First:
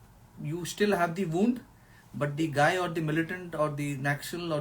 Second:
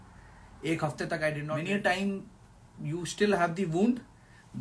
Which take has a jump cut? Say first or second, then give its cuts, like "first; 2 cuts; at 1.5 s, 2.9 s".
second; 1 cut; at 1.4 s